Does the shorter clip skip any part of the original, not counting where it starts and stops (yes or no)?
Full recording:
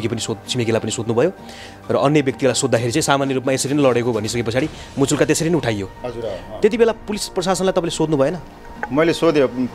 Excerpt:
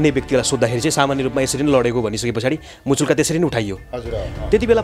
no